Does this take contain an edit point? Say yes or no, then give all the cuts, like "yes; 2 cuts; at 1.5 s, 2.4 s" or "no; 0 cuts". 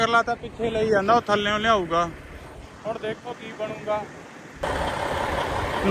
yes; 1 cut; at 4.6 s